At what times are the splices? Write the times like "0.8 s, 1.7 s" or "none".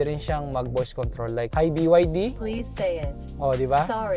1.5 s, 2.4 s